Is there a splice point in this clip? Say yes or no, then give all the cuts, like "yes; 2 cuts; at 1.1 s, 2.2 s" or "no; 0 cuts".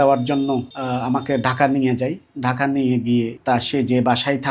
yes; 1 cut; at 3.4 s